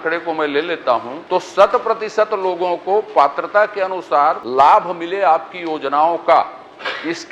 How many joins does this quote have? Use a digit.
2